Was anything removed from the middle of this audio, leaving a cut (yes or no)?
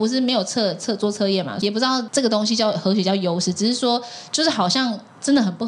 yes